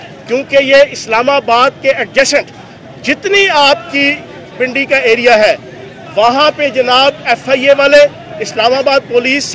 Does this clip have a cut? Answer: no; 0 cuts

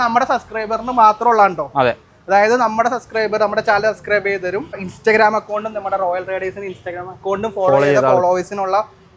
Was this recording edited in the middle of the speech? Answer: yes; 1 cut; at 4.9 s

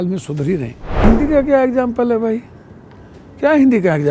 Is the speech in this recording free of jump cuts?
no; 1 cut; at 1.0 s

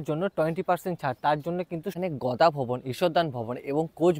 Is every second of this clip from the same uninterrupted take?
no; 1 cut; at 1.9 s

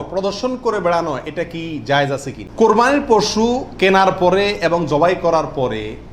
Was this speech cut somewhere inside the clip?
yes; 1 cut; at 2.4 s

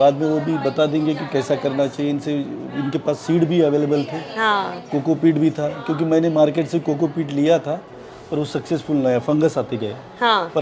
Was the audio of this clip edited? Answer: no; 0 cuts

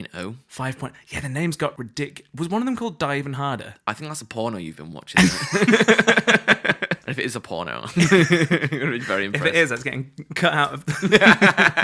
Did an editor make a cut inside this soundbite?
yes; 2 cuts; at 1.8 s, 7.0 s

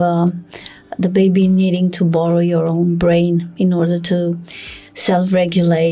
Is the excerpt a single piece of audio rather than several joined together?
yes; 0 cuts

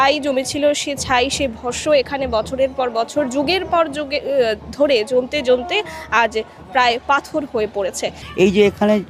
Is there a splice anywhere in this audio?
yes; 1 cut; at 8.2 s

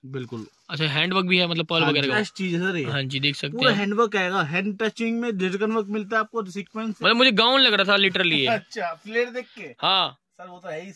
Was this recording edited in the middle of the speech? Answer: yes; 2 cuts; at 2.1 s, 6.9 s

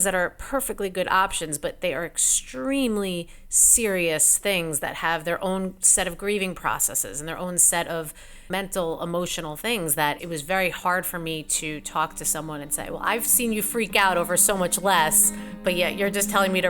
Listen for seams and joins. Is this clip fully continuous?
no; 2 cuts; at 8.5 s, 10.2 s

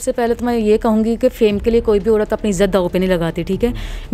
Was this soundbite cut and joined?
no; 0 cuts

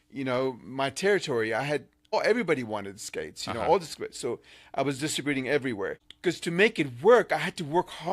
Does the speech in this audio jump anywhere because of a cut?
yes; 2 cuts; at 2.0 s, 6.0 s

